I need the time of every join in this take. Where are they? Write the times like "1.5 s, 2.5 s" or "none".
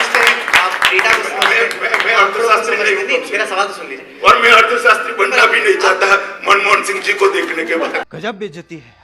8.0 s